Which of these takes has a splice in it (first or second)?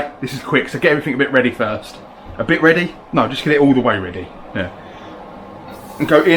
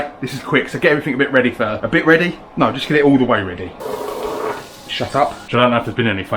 second